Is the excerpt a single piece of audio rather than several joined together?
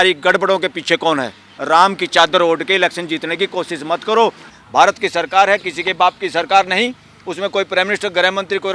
no; 2 cuts; at 1.5 s, 4.5 s

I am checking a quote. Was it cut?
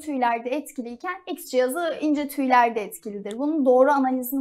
no; 0 cuts

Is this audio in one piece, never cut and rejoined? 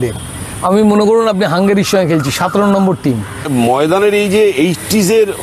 no; 1 cut; at 3.5 s

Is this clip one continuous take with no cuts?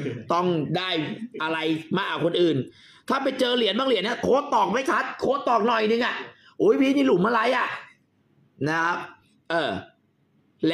yes; 0 cuts

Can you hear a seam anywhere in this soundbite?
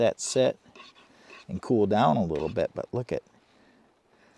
no; 0 cuts

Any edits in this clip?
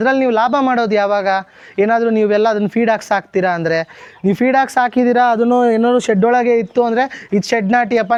no; 0 cuts

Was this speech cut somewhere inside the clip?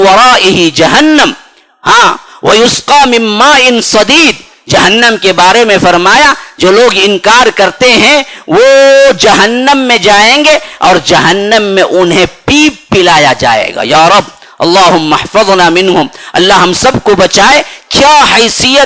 no; 0 cuts

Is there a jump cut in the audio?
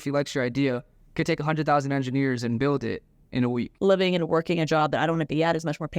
yes; 2 cuts; at 2.6 s, 3.7 s

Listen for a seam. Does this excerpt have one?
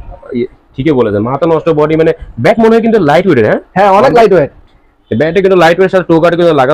no; 0 cuts

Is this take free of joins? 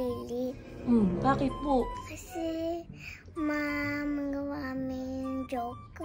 no; 1 cut; at 2.0 s

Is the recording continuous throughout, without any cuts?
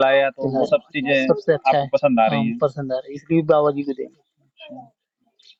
yes; 0 cuts

